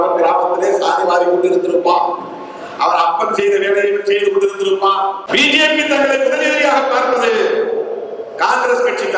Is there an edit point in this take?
yes; 1 cut; at 5.2 s

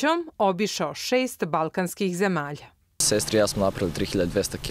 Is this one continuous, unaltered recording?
yes; 0 cuts

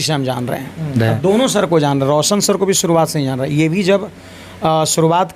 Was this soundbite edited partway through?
yes; 1 cut; at 1.0 s

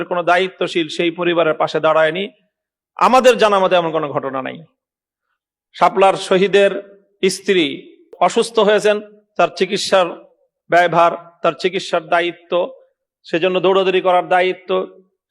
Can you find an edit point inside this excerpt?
yes; 1 cut; at 8.1 s

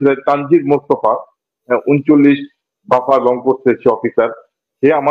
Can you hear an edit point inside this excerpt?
no; 0 cuts

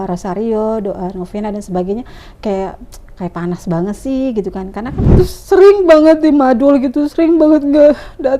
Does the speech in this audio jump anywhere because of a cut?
yes; 1 cut; at 5.0 s

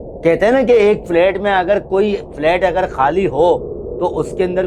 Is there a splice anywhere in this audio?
no; 0 cuts

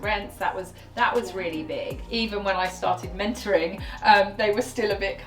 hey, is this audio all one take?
no; 1 cut; at 2.0 s

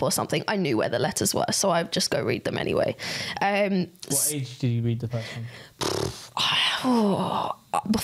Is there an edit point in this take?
no; 0 cuts

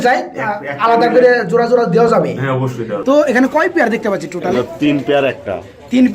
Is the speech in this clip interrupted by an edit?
yes; 1 cut; at 2.9 s

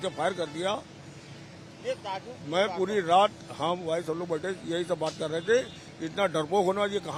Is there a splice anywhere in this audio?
no; 0 cuts

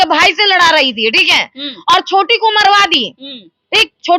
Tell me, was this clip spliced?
no; 0 cuts

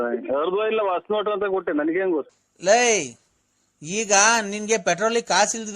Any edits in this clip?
yes; 1 cut; at 2.3 s

